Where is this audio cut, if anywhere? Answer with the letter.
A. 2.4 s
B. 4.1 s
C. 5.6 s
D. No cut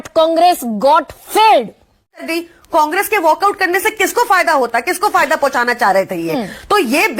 A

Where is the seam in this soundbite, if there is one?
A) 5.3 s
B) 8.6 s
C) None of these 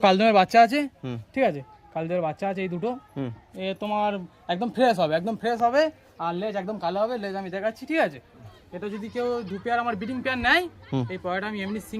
B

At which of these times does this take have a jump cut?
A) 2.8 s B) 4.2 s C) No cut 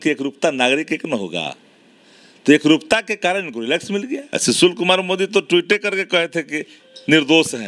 B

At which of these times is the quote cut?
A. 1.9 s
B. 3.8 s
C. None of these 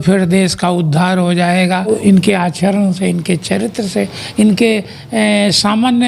A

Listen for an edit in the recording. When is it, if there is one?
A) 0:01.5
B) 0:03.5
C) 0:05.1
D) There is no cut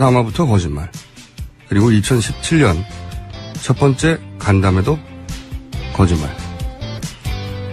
A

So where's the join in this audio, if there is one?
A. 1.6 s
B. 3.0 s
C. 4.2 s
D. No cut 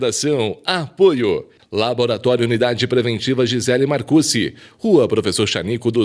A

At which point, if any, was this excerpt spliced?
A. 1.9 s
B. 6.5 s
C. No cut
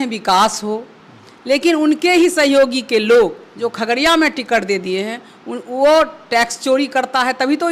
C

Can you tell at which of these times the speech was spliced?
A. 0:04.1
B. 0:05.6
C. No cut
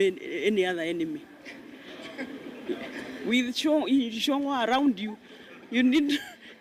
C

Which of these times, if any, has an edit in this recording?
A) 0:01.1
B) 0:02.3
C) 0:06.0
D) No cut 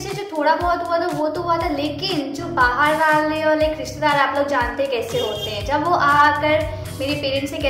D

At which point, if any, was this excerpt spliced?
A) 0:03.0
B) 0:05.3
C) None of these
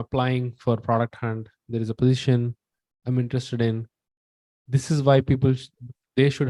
C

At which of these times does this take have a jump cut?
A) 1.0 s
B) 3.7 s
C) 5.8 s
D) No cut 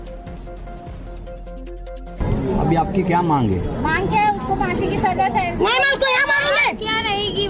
D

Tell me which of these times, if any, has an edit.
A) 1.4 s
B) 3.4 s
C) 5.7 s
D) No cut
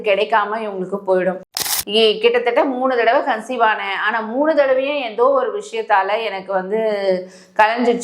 A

